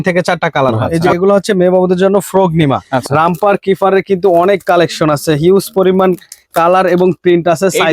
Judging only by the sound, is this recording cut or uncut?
cut